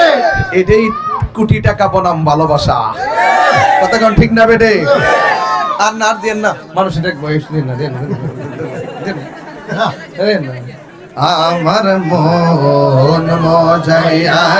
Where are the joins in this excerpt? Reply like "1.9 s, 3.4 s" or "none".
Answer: none